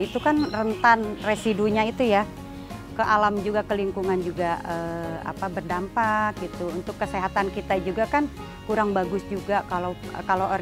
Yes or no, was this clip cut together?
no